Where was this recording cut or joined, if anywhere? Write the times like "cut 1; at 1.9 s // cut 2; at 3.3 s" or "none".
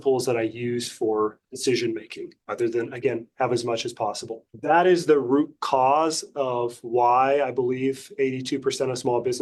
none